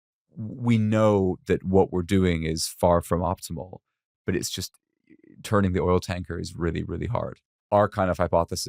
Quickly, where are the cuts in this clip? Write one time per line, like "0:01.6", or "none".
0:07.5